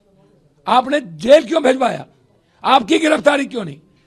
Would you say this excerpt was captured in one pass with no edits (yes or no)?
yes